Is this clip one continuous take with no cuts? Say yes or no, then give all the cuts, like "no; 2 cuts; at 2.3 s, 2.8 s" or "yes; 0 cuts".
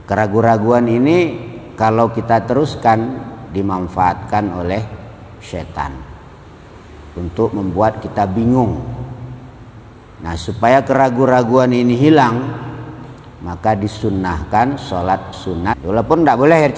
no; 1 cut; at 15.7 s